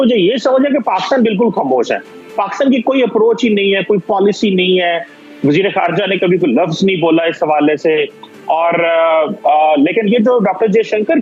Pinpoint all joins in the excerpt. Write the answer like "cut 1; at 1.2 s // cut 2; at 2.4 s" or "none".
none